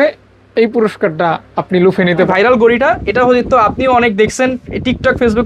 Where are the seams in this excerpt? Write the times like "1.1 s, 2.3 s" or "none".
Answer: 2.3 s